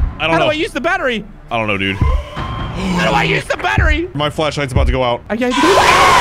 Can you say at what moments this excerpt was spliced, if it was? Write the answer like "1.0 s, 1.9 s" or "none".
4.2 s, 5.2 s